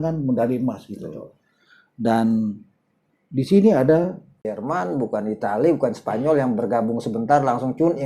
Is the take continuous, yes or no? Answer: no